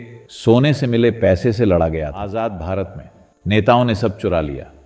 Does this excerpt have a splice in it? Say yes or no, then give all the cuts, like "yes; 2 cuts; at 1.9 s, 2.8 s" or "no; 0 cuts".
yes; 1 cut; at 2.2 s